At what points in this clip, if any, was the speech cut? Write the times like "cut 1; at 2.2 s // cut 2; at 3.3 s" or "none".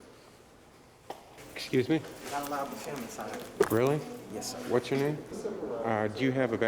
cut 1; at 1.4 s // cut 2; at 5.3 s